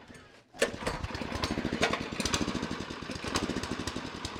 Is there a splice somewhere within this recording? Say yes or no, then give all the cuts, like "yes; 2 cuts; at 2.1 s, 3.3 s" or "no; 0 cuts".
no; 0 cuts